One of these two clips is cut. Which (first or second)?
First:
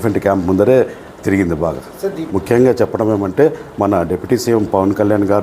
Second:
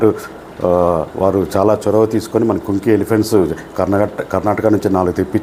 first